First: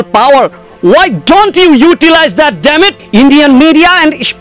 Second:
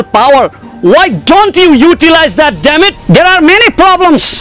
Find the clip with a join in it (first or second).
first